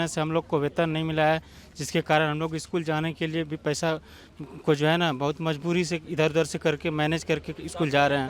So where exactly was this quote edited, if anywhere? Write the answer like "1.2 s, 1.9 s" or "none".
none